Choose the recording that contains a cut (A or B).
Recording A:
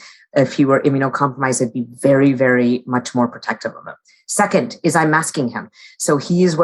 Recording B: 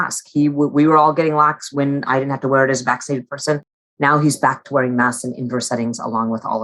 B